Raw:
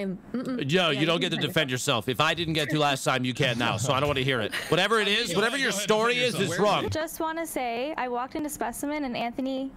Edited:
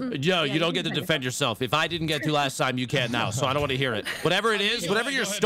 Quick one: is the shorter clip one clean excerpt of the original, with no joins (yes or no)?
yes